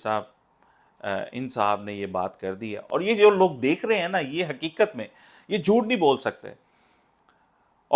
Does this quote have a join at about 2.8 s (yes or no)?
yes